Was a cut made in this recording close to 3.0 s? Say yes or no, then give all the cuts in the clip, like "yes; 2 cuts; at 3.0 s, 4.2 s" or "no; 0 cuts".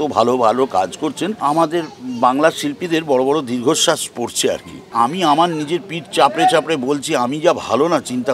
no; 2 cuts; at 1.4 s, 4.9 s